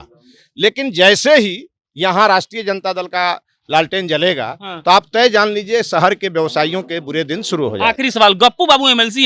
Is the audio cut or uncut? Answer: uncut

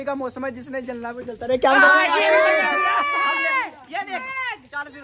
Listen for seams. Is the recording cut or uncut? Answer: uncut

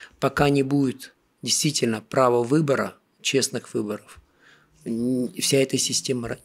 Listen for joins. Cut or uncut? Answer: uncut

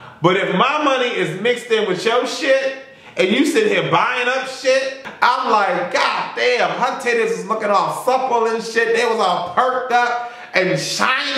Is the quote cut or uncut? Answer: cut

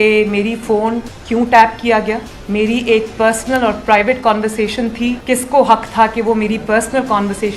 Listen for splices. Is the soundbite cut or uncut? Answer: cut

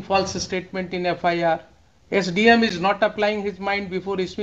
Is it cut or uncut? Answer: uncut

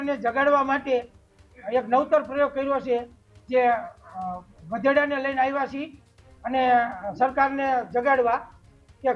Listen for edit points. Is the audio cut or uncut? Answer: uncut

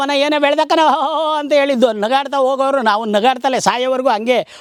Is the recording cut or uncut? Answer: uncut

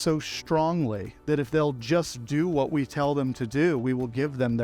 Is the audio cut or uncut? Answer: uncut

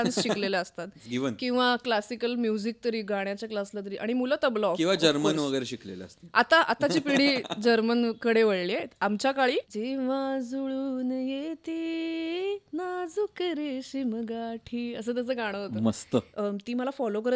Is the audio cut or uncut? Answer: cut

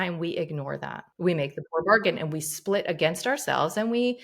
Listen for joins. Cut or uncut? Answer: cut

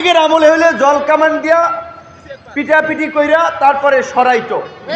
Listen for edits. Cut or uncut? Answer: uncut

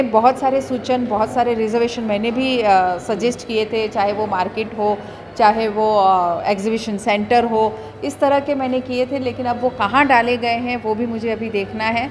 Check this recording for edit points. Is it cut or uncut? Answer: uncut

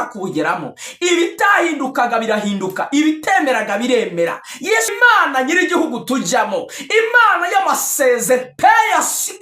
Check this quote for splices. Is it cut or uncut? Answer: cut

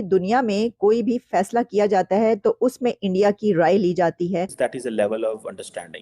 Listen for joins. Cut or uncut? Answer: cut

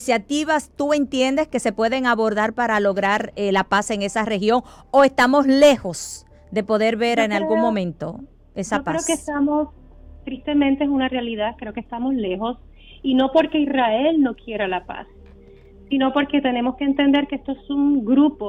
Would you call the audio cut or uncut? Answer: uncut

